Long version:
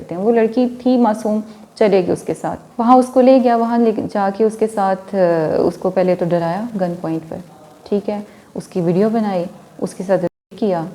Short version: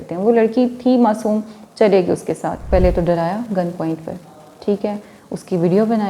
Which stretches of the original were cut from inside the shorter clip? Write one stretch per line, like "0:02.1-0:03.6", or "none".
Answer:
0:02.6-0:05.9

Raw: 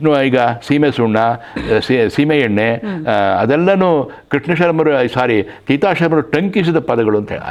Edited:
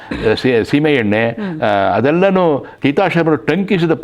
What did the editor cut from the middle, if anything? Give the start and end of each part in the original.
0:04.2-0:05.6

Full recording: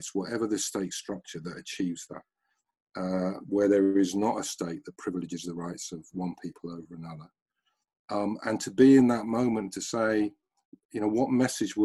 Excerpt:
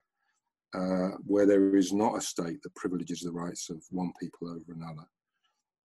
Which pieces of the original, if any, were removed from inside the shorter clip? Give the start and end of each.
none

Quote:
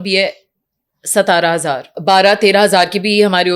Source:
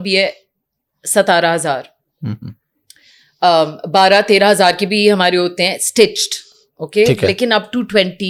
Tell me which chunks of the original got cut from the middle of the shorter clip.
0:01.9-0:03.8

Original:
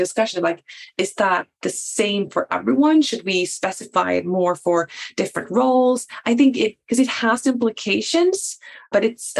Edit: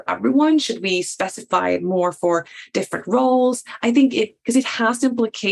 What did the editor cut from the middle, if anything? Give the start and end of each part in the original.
none

